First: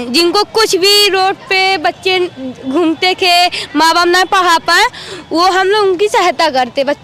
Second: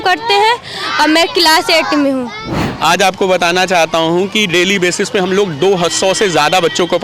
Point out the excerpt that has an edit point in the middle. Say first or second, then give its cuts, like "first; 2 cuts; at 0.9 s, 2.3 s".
second; 1 cut; at 2.6 s